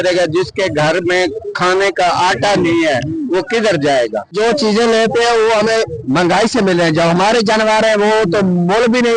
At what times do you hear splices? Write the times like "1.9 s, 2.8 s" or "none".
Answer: 4.3 s